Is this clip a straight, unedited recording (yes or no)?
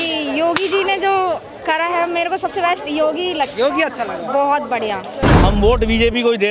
no